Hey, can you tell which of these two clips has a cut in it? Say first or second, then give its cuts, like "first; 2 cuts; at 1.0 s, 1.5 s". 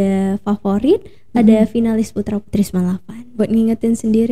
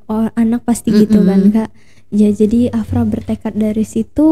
first; 1 cut; at 3.4 s